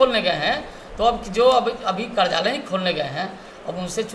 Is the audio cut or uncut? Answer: uncut